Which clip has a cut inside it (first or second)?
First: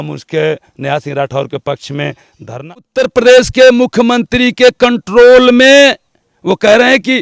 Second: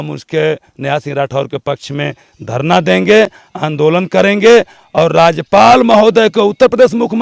first